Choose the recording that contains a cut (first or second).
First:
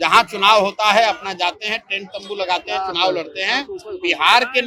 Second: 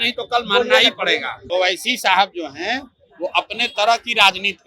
second